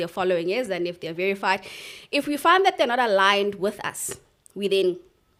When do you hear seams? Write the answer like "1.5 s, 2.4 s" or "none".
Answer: none